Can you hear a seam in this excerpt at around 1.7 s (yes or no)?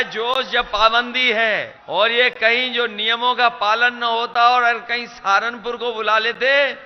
yes